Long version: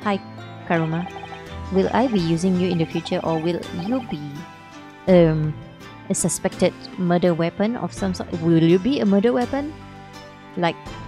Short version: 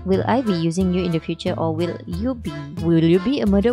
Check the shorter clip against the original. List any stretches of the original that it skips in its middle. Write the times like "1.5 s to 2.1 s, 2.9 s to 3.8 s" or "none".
4.3 s to 8.3 s